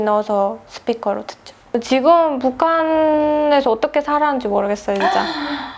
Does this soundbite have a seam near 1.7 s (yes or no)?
yes